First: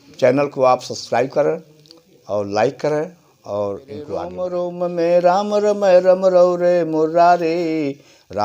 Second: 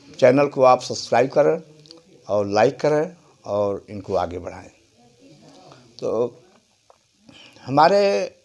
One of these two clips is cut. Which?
first; 1 cut; at 4.4 s

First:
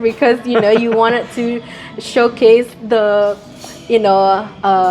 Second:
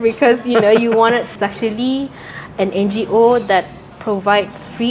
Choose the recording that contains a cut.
second; 2 cuts; at 1.4 s, 3.9 s

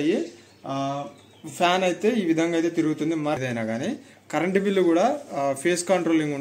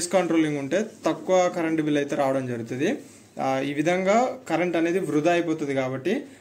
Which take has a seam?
first; 1 cut; at 3.4 s

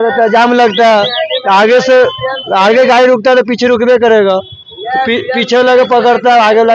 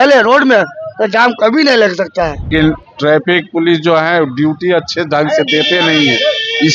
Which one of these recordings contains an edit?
second; 1 cut; at 2.5 s

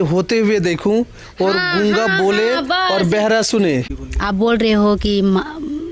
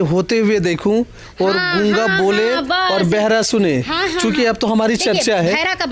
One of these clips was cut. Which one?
first; 1 cut; at 3.9 s

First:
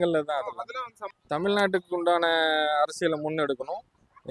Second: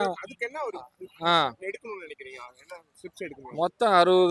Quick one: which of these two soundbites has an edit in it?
first; 1 cut; at 1.1 s

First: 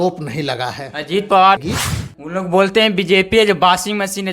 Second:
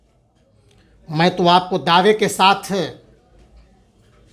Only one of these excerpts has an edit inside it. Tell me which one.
first; 1 cut; at 1.6 s

